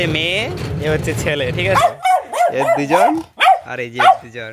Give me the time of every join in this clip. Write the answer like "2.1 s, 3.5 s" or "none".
1.6 s